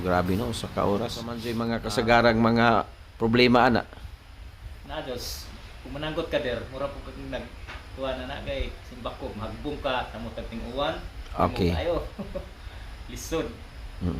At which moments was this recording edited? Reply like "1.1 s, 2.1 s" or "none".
1.5 s

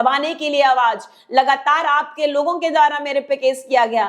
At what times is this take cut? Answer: none

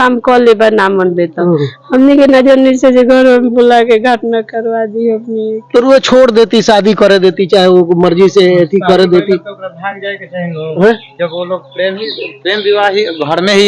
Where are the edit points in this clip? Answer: none

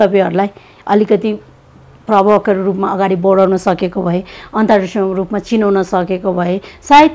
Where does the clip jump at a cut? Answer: none

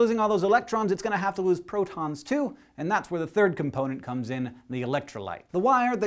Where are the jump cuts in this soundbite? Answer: 4.7 s

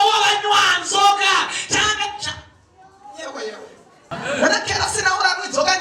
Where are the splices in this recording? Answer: 4.1 s

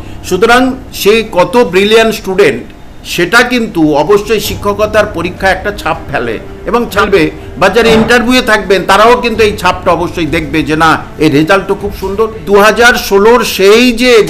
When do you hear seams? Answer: 6.9 s, 12.4 s

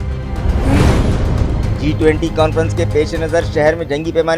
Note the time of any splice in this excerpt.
1.7 s

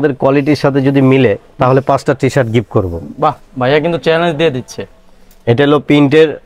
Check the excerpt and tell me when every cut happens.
none

